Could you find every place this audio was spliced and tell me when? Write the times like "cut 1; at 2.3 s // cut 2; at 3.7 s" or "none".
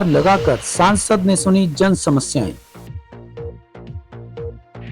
cut 1; at 2.7 s

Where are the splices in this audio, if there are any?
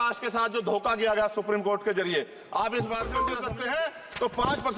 cut 1; at 3.3 s

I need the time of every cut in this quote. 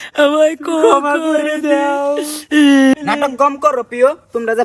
cut 1; at 2.9 s

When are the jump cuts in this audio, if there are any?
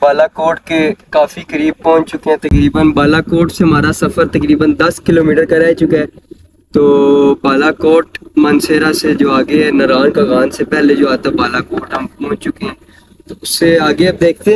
none

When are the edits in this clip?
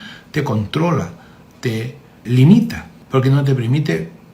cut 1; at 2.2 s // cut 2; at 2.9 s

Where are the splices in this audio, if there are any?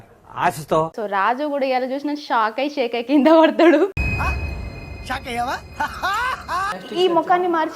cut 1; at 6.8 s

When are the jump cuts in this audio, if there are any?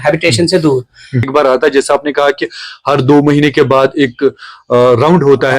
cut 1; at 1.3 s

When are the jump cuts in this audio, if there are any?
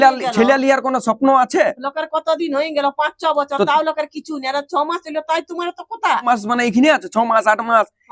cut 1; at 6.2 s

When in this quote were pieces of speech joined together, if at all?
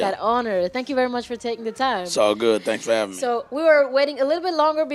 cut 1; at 1.0 s

